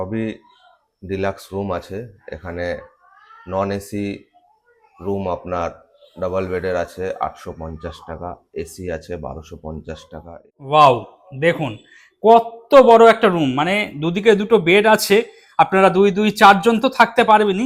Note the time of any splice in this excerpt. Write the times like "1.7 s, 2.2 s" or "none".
10.3 s